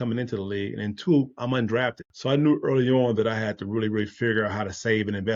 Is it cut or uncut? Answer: cut